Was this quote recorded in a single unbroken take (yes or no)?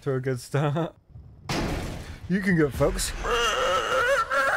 no